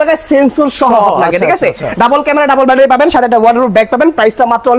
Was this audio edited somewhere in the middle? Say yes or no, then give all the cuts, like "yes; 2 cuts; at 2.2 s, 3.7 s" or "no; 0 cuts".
no; 0 cuts